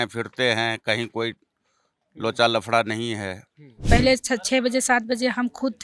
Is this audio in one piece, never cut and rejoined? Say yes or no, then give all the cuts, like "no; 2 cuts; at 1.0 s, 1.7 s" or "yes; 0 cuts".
no; 1 cut; at 3.8 s